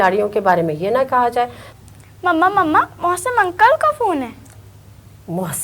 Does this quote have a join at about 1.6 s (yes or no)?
yes